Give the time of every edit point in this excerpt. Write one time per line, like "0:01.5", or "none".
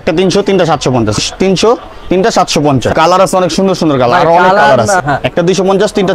0:01.2
0:02.9
0:05.0